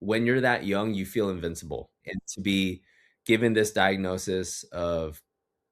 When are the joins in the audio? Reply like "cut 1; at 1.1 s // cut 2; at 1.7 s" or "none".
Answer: cut 1; at 2.0 s